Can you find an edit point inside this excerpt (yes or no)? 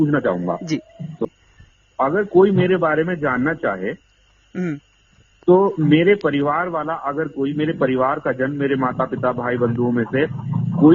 yes